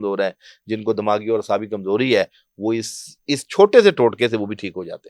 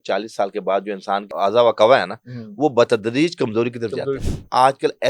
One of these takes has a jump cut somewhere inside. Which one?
second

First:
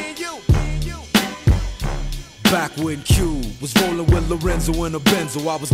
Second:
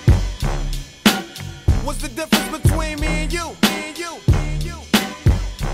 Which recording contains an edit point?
second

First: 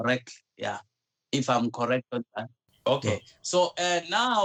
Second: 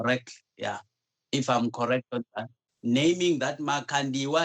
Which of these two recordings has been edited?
second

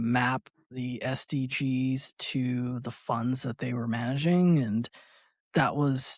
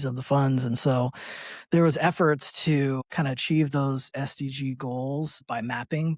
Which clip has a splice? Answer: second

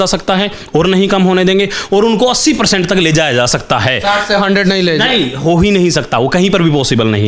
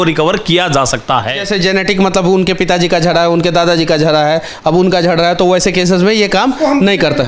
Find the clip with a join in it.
second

